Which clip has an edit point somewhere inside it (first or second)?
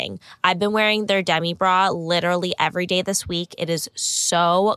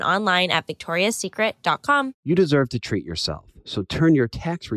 second